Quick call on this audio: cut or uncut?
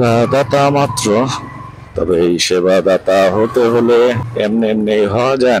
cut